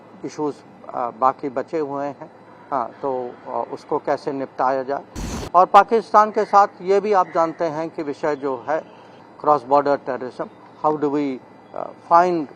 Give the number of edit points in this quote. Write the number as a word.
one